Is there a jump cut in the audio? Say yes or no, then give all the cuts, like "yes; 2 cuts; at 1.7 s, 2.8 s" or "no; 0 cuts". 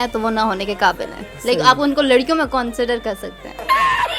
no; 0 cuts